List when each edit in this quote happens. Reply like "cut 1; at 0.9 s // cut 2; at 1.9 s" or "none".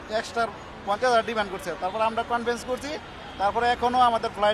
none